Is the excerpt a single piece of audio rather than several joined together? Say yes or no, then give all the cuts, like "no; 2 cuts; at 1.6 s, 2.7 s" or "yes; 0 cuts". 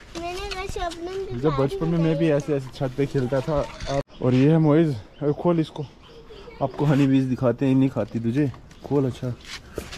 no; 1 cut; at 4.1 s